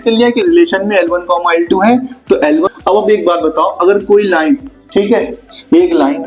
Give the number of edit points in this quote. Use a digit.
1